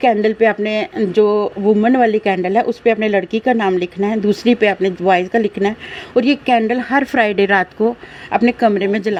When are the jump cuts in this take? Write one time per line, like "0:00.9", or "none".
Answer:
none